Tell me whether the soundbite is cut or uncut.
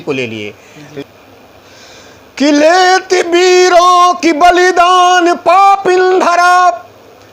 cut